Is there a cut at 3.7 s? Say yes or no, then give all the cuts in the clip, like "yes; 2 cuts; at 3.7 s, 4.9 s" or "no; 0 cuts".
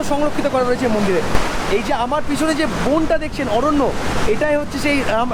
no; 1 cut; at 1.3 s